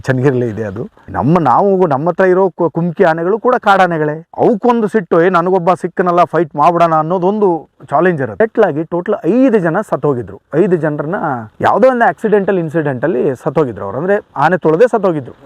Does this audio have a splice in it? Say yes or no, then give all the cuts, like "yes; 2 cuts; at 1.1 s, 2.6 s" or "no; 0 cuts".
yes; 2 cuts; at 1.0 s, 8.4 s